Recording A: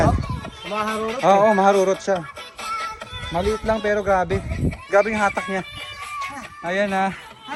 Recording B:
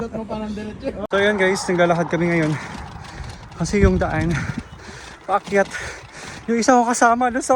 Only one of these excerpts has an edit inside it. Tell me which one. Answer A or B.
B